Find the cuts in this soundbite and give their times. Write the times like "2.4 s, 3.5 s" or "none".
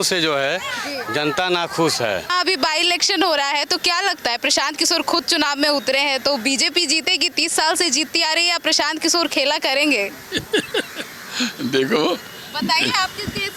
none